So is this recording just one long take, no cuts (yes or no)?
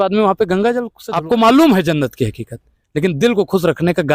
no